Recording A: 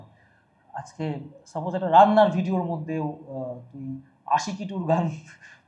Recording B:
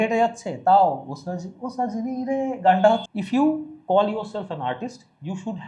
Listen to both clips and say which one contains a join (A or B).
B